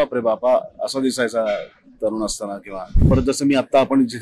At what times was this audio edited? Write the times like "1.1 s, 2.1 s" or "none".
3.1 s